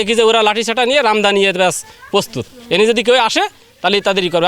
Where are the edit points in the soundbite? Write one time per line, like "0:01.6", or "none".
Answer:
none